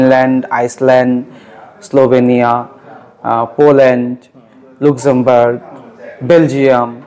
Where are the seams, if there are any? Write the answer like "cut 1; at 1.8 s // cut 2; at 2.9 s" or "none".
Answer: none